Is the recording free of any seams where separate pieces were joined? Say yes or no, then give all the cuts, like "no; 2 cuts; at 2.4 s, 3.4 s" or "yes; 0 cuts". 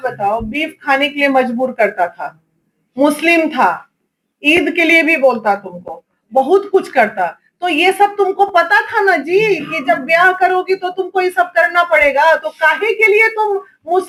yes; 0 cuts